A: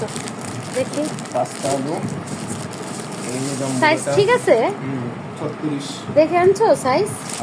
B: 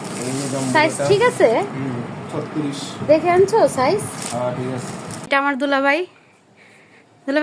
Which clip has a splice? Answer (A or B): B